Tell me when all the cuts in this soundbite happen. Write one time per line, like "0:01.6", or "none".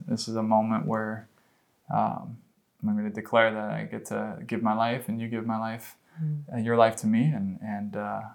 none